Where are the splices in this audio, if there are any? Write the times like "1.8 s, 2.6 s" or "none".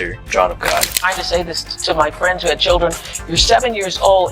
0.9 s